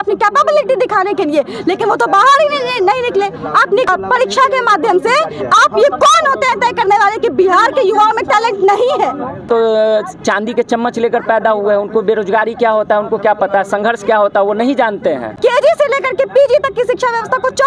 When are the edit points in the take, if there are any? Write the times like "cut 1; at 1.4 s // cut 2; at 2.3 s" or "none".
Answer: cut 1; at 3.9 s // cut 2; at 9.5 s // cut 3; at 15.4 s